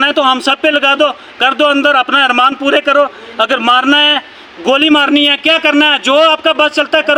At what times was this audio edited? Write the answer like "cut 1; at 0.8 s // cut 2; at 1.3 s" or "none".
none